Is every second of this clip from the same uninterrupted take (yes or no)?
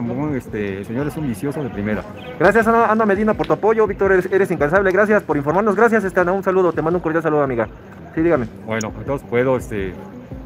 yes